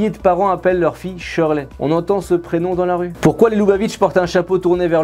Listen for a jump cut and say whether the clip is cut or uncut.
uncut